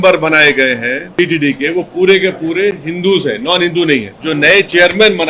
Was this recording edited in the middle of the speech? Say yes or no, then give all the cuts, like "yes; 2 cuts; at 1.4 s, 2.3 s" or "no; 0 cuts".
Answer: yes; 2 cuts; at 1.0 s, 4.1 s